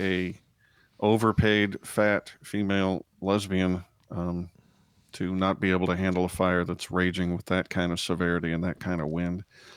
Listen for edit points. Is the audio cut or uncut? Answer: uncut